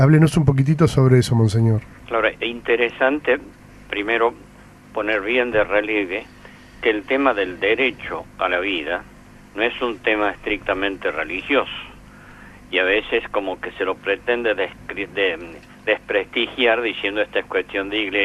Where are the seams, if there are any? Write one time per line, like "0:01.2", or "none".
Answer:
none